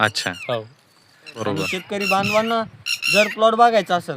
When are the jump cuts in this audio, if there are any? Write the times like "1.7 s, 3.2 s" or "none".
1.4 s

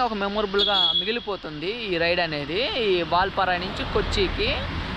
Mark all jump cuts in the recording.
none

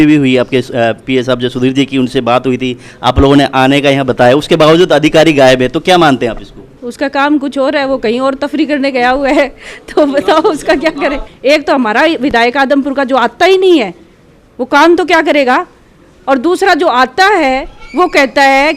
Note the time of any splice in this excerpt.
6.8 s, 11.2 s

